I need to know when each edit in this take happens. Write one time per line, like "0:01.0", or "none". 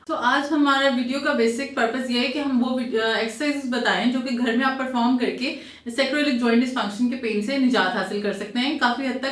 none